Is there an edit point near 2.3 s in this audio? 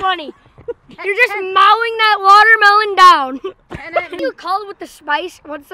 no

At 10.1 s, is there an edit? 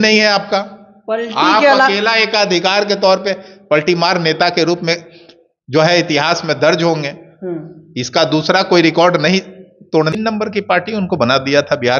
yes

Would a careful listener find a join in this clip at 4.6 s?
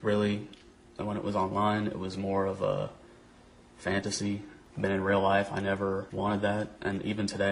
yes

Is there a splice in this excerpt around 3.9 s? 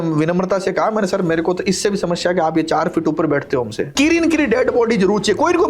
yes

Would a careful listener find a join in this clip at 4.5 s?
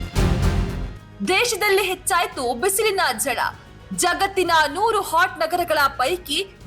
no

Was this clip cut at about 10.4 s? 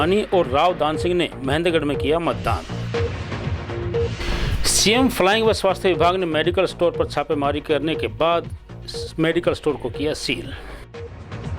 yes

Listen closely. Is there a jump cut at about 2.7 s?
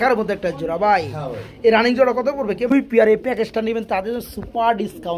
yes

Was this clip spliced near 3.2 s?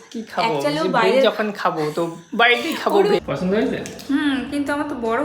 yes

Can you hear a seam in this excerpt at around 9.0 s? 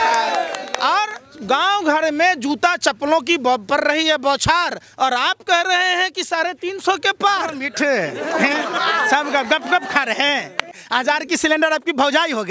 no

